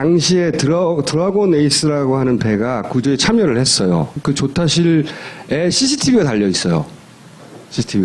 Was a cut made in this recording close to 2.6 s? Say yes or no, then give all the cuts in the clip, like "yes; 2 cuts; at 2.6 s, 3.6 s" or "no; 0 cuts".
yes; 1 cut; at 2.6 s